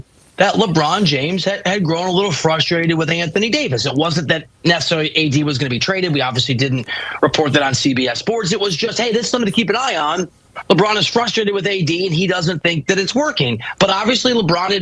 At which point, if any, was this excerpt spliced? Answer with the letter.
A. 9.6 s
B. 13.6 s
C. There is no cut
B